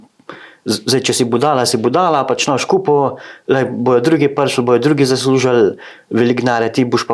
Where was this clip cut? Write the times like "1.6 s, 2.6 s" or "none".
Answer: none